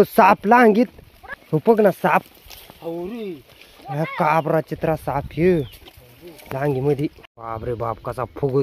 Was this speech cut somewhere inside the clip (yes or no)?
yes